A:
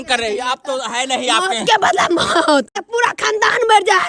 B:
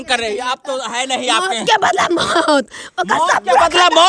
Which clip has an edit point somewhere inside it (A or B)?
A